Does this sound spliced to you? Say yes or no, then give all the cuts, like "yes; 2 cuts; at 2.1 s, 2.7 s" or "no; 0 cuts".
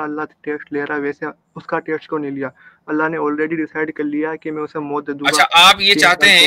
no; 0 cuts